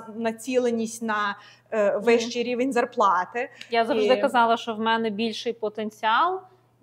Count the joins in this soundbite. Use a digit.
0